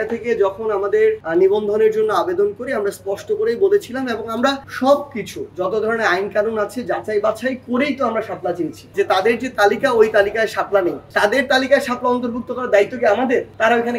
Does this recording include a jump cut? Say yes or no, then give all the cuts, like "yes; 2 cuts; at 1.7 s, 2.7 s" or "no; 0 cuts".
yes; 3 cuts; at 1.2 s, 4.7 s, 8.8 s